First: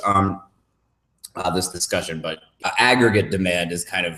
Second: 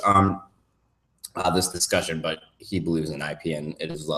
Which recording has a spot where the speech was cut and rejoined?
second; 1 cut; at 2.5 s

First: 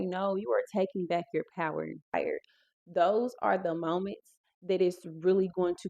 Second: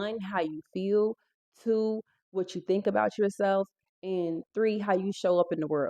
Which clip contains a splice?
first; 1 cut; at 2.0 s

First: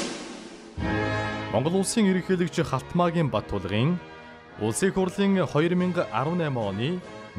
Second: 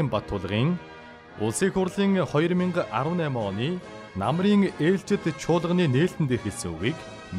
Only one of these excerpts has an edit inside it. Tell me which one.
first; 1 cut; at 1.5 s

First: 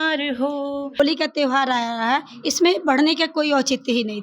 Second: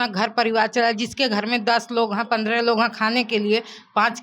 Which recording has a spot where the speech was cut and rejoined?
first; 1 cut; at 1.0 s

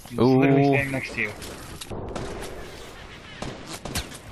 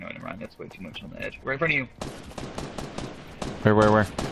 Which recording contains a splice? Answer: first; 1 cut; at 1.9 s

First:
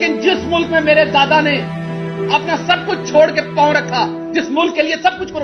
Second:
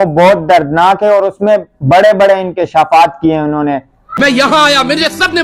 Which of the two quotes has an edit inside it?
second; 1 cut; at 4.0 s

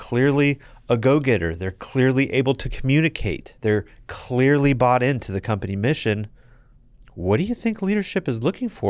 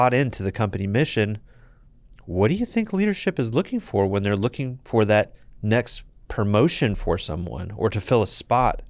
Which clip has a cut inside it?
first; 1 cut; at 3.5 s

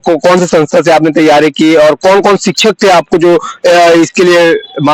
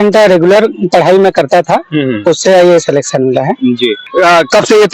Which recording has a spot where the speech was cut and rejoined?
second; 1 cut; at 4.0 s

